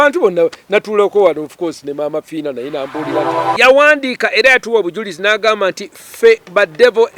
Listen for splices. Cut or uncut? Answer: cut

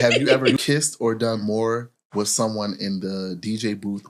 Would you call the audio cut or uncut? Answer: uncut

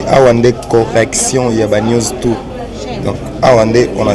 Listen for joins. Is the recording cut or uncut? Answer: uncut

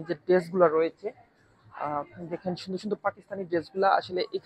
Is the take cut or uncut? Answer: uncut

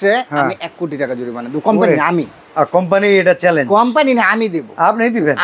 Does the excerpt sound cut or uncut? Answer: uncut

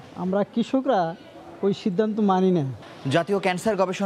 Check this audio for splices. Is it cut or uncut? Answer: uncut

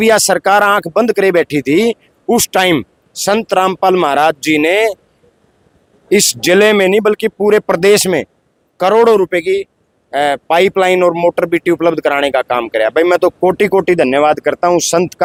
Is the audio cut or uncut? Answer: uncut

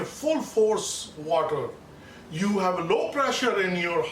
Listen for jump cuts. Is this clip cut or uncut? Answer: uncut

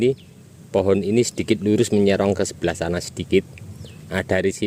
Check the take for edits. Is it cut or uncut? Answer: uncut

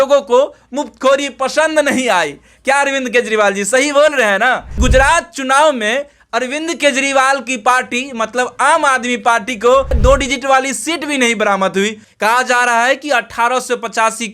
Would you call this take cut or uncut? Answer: cut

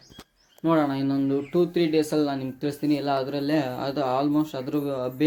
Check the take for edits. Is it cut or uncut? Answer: uncut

